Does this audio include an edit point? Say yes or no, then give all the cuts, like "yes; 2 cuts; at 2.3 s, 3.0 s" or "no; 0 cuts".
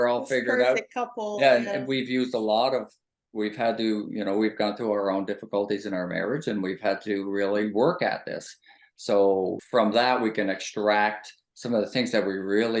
yes; 1 cut; at 9.6 s